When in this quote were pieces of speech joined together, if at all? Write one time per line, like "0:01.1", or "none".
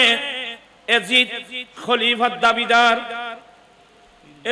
none